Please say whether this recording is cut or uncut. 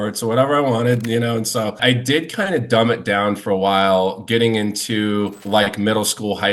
cut